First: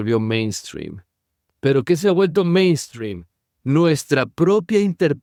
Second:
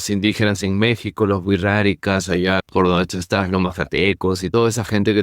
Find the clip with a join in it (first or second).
second